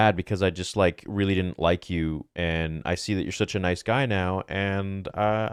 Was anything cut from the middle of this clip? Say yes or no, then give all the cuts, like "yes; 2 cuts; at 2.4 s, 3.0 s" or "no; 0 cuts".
no; 0 cuts